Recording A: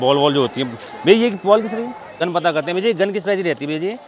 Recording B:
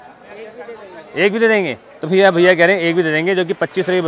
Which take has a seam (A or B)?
A